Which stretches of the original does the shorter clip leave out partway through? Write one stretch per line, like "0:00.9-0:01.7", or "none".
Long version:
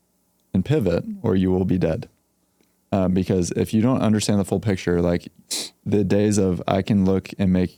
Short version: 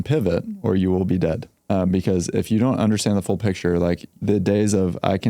0:02.1-0:02.7
0:05.3-0:05.7